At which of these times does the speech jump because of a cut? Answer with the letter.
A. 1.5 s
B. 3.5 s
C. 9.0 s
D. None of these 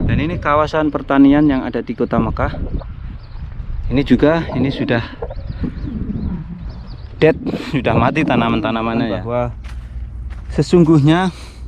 C